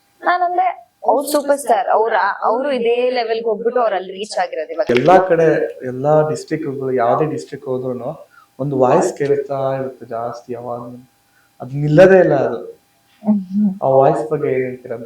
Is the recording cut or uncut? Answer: cut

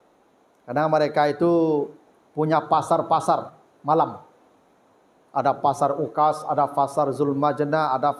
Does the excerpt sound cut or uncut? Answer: uncut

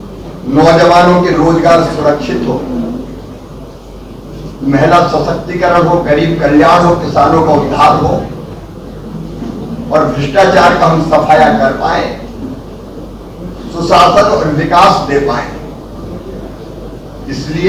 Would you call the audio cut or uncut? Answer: uncut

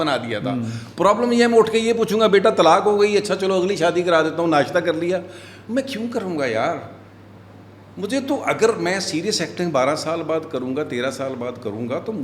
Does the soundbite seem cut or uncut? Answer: uncut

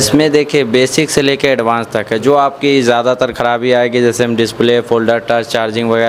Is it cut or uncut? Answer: uncut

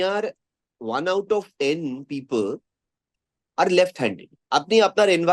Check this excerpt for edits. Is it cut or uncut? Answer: cut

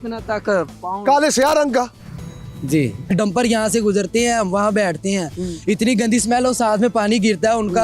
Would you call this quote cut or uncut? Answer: cut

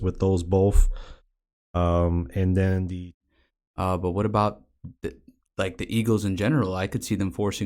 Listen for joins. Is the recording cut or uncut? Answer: cut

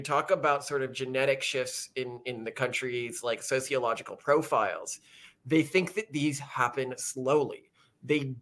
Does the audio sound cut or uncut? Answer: uncut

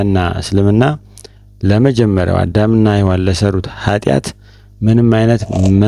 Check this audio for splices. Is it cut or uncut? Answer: uncut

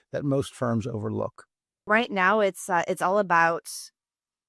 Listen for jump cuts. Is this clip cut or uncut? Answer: cut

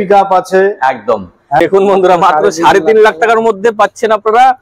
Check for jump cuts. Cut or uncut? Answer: cut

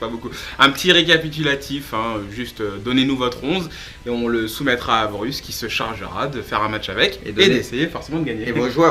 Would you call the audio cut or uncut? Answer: cut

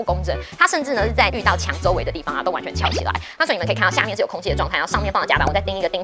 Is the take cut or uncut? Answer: cut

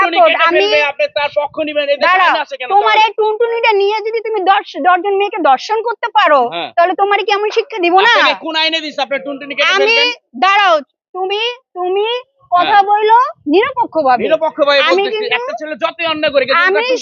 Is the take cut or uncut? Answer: uncut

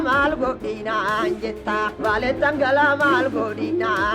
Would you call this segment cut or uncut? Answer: cut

